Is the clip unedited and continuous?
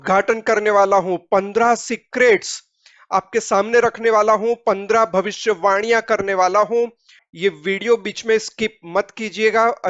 yes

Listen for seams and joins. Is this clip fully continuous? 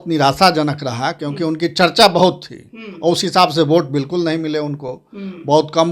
yes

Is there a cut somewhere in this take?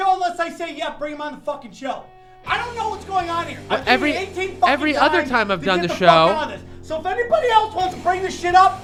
no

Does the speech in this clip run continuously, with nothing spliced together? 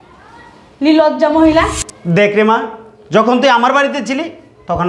no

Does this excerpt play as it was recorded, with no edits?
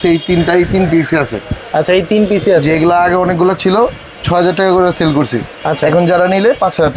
yes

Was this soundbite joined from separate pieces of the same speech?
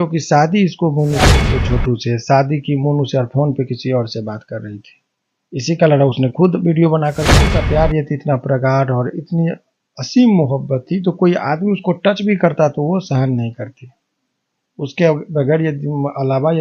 yes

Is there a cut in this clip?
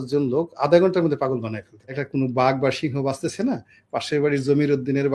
yes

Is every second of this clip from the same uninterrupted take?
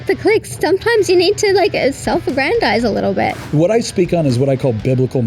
no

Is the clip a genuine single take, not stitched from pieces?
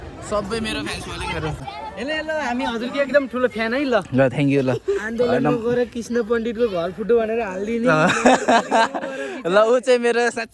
no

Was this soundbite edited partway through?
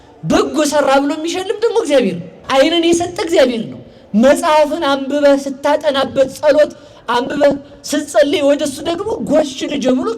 yes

